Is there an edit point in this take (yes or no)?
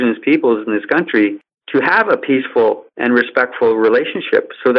yes